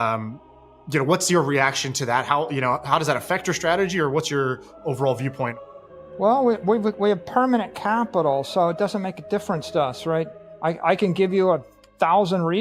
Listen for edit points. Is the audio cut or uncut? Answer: cut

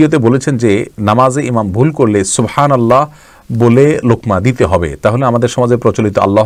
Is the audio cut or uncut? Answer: uncut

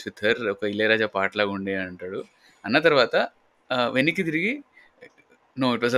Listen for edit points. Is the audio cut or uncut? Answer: uncut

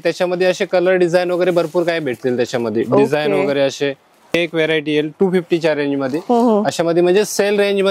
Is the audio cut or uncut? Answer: cut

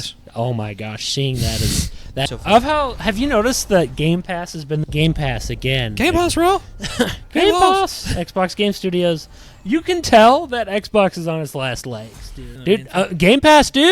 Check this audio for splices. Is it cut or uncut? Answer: cut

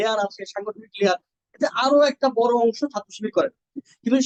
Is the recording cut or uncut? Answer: uncut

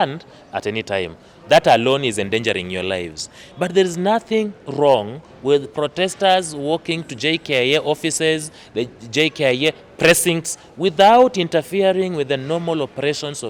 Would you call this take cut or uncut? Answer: uncut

